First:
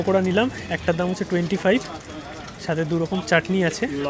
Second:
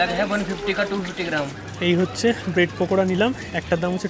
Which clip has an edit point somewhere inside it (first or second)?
second